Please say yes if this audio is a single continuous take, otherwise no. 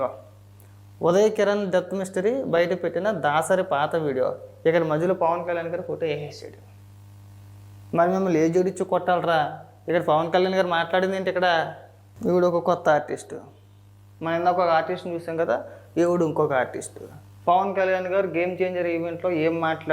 no